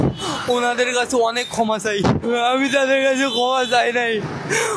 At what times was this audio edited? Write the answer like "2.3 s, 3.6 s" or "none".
2.2 s